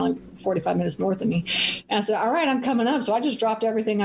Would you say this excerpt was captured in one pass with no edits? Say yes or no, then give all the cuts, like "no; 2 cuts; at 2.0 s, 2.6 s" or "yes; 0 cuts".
yes; 0 cuts